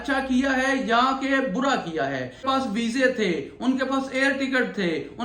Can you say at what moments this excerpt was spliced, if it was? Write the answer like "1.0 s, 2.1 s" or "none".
2.4 s